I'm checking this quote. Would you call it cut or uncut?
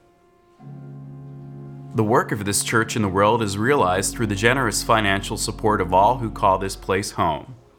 cut